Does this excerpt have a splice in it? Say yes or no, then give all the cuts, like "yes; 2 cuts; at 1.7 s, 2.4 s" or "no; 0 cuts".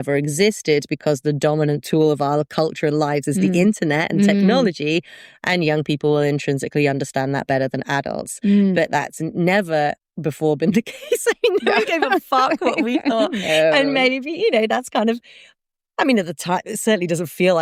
no; 0 cuts